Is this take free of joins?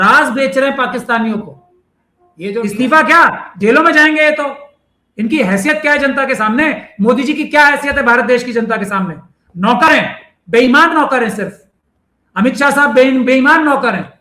no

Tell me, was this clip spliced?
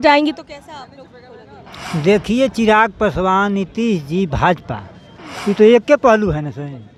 no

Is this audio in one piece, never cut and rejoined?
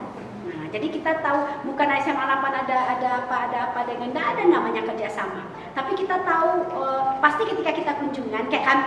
yes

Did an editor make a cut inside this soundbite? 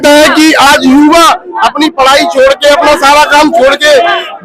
no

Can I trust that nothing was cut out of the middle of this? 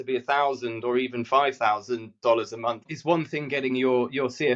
no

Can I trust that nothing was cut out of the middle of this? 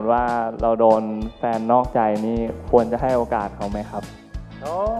yes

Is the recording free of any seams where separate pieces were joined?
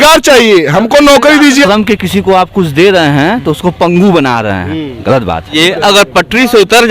no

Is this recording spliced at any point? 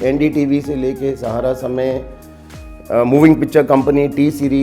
no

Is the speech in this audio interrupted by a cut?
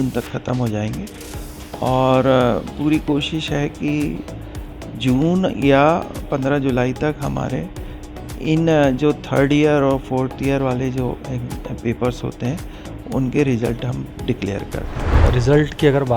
yes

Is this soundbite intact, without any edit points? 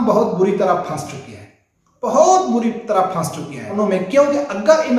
no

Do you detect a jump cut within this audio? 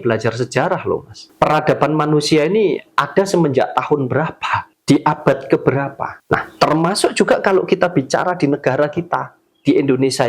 yes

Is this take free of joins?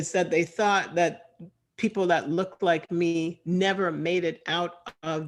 yes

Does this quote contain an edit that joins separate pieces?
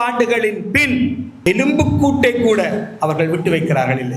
yes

